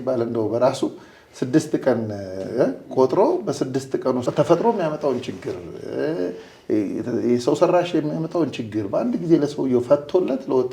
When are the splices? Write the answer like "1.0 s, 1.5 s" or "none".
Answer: 4.2 s